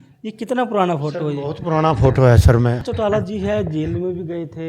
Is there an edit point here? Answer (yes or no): yes